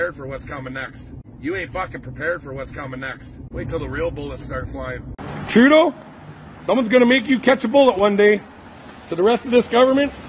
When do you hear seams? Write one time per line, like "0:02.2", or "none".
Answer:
0:01.2
0:03.3